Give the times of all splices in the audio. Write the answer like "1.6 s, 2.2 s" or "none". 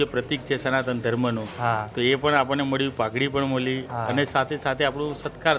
none